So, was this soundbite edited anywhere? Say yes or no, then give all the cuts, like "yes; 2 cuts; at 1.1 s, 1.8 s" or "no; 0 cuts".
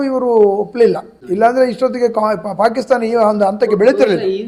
no; 0 cuts